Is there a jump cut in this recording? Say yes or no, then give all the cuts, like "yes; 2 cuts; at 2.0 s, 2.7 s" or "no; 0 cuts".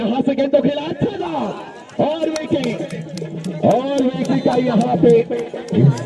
no; 0 cuts